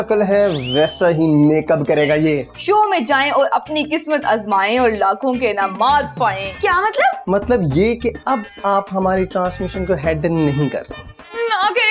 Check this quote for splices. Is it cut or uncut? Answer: cut